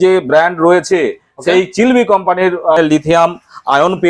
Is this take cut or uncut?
cut